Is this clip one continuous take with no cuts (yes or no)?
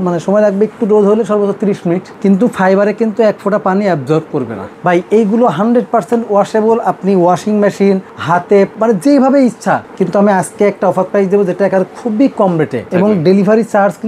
no